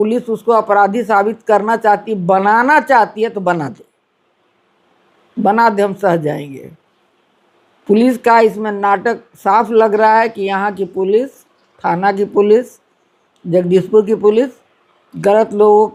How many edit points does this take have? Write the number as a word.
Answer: zero